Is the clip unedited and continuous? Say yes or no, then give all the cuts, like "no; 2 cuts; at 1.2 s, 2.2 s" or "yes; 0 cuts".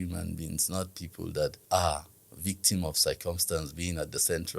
no; 1 cut; at 1.6 s